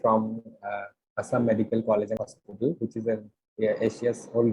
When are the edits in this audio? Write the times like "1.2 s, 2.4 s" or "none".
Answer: 2.2 s